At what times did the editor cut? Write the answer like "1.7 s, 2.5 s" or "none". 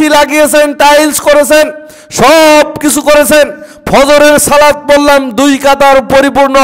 none